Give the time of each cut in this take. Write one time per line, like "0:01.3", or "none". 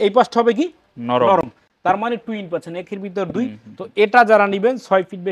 none